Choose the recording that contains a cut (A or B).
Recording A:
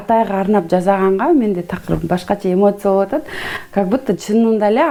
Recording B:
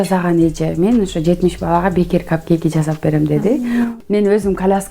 B